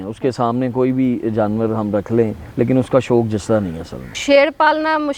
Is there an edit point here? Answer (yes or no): yes